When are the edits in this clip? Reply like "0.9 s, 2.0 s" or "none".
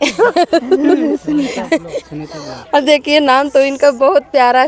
none